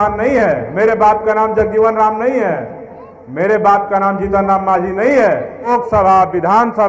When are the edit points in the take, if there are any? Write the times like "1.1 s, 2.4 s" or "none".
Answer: 5.7 s

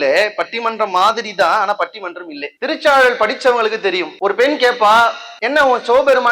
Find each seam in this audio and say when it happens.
none

